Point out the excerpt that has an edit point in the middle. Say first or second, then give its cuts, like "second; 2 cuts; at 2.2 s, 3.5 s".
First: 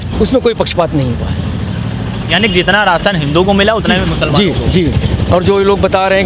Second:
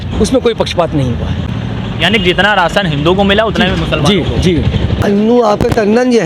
second; 2 cuts; at 1.4 s, 5.0 s